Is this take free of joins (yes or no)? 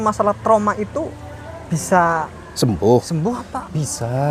no